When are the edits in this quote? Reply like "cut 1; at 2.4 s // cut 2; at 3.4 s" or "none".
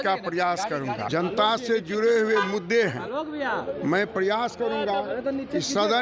cut 1; at 1.0 s